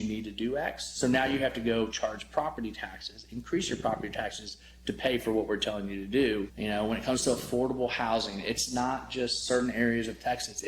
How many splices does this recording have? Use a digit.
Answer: 1